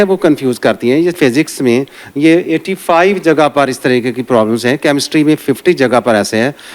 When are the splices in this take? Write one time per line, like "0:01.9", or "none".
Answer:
0:01.2